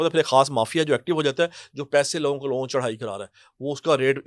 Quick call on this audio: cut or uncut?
uncut